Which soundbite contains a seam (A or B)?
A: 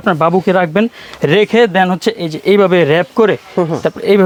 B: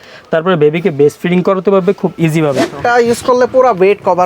B